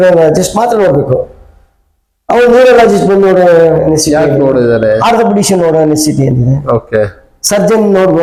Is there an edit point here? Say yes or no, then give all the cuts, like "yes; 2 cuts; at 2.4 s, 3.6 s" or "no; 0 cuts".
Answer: no; 0 cuts